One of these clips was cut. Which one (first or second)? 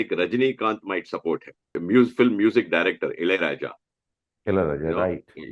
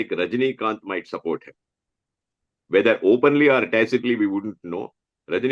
first